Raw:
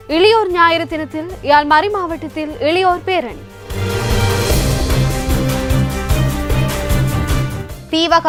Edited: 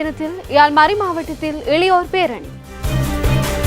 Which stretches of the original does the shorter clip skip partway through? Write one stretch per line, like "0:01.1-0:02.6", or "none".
0:03.7-0:06.0